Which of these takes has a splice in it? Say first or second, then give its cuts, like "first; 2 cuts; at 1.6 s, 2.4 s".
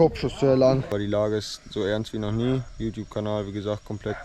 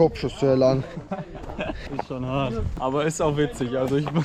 first; 2 cuts; at 0.9 s, 2.7 s